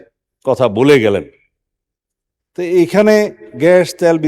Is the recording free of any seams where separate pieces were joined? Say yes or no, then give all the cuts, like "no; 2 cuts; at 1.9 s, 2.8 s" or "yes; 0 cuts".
yes; 0 cuts